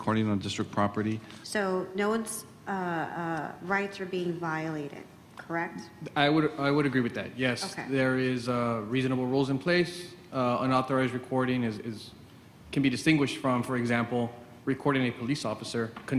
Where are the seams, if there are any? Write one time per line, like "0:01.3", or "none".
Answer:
0:01.3

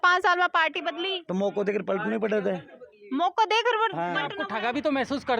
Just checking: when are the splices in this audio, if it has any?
0:04.4

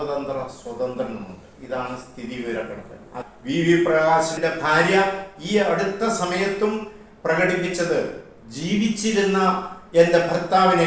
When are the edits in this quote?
0:03.2
0:04.4

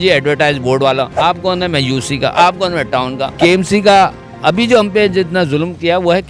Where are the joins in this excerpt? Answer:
0:03.2

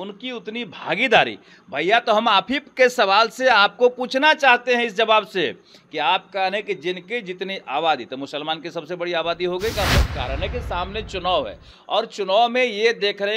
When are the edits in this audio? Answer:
0:09.7

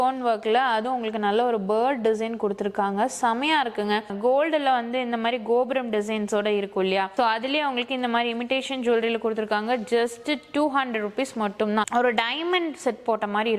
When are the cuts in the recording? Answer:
0:04.0
0:07.1
0:11.9

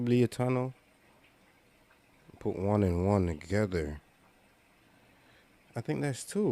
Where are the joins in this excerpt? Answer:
none

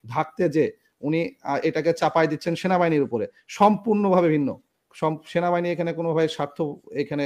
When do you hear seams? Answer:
none

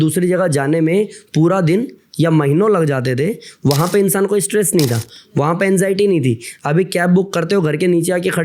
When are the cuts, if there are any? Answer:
none

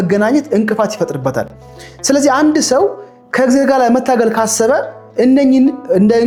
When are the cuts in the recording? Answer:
none

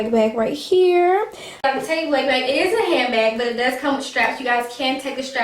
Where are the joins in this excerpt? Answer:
0:01.6

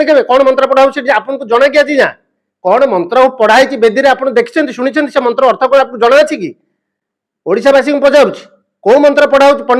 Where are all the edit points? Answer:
none

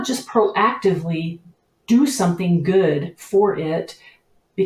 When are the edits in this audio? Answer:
none

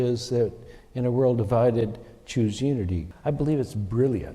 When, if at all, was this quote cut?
0:03.1

